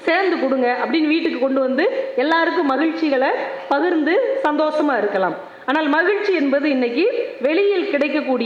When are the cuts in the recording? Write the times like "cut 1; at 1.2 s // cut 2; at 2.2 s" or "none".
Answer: none